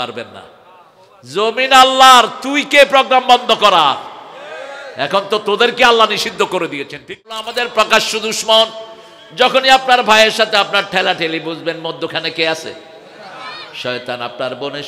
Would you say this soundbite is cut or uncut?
cut